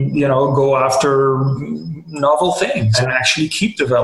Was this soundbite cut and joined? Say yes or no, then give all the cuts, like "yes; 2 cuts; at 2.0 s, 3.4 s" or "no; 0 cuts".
yes; 1 cut; at 2.9 s